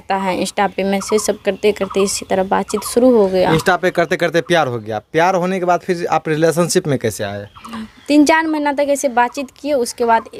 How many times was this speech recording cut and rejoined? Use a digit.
0